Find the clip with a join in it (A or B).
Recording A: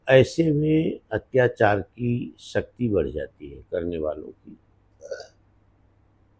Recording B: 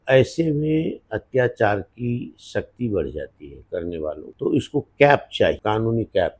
B